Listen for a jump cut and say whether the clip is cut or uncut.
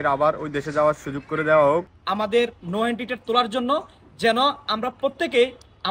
cut